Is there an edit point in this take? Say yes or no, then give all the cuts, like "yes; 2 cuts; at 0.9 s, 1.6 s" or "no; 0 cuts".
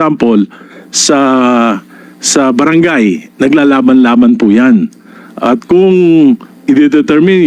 no; 0 cuts